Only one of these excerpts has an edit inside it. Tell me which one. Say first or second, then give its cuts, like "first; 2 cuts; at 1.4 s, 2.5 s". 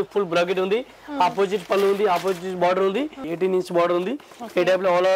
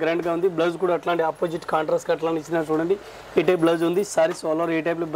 first; 1 cut; at 3.2 s